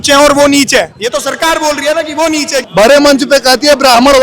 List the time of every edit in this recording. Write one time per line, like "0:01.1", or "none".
0:02.6